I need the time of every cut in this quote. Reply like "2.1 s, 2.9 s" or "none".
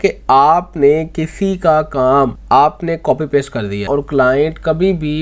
2.4 s, 3.9 s